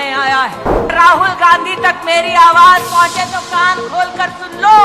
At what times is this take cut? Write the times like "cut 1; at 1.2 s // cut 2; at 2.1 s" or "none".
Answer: cut 1; at 0.9 s